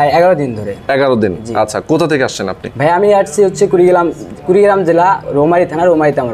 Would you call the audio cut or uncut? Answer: uncut